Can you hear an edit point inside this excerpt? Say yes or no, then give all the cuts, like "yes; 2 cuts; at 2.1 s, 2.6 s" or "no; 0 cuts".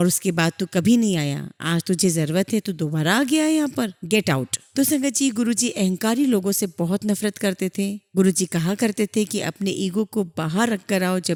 no; 0 cuts